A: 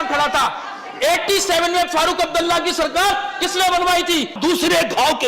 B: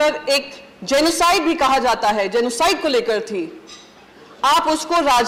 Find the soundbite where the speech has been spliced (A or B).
A